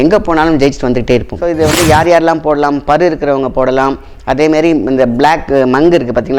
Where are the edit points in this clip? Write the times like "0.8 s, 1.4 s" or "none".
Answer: 1.4 s